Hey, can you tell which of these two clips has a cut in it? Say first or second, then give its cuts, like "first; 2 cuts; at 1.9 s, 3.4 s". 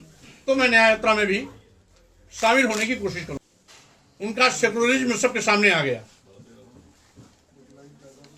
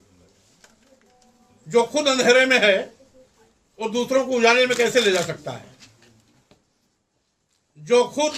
first; 1 cut; at 3.4 s